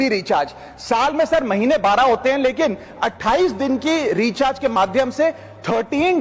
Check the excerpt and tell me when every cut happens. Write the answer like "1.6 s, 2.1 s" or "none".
none